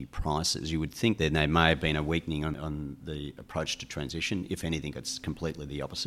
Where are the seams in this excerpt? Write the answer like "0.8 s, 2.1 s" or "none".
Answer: 1.2 s, 2.5 s

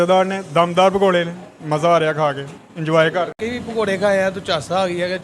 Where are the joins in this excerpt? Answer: 3.4 s

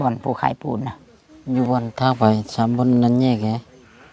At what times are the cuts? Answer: none

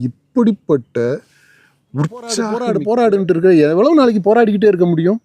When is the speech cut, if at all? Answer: 2.5 s

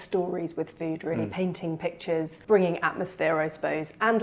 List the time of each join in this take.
2.4 s

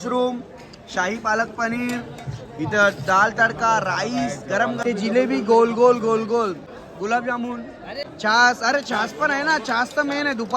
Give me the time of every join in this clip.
4.8 s, 6.7 s, 8.0 s

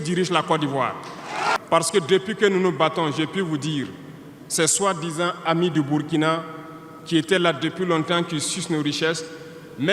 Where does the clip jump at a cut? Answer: 1.6 s

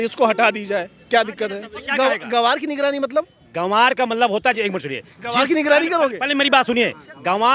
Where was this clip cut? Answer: 1.9 s

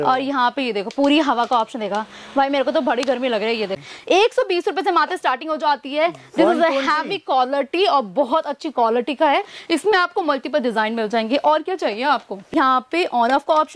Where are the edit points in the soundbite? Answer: 3.8 s, 12.5 s

